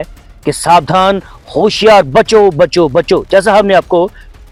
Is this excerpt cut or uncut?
uncut